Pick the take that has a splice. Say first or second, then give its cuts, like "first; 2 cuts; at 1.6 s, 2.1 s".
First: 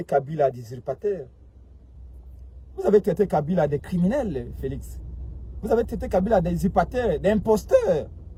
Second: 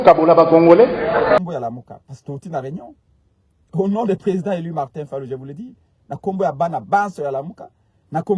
second; 1 cut; at 1.4 s